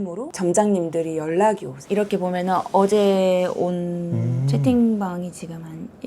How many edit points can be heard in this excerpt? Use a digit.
1